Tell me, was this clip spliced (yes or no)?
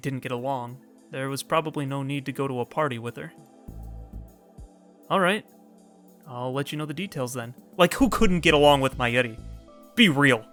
no